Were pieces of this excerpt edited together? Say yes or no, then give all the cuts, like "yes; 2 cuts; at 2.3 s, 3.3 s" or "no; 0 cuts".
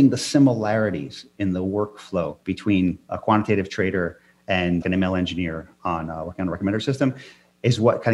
yes; 3 cuts; at 1.2 s, 2.7 s, 4.8 s